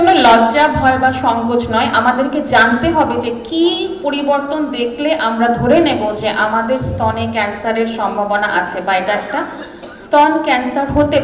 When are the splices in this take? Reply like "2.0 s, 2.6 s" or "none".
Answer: none